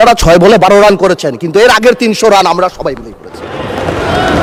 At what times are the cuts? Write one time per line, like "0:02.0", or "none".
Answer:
none